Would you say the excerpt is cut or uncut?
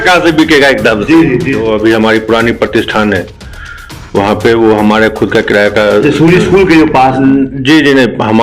cut